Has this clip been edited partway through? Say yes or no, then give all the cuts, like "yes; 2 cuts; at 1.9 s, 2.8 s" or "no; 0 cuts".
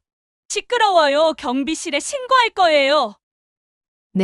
yes; 1 cut; at 3.2 s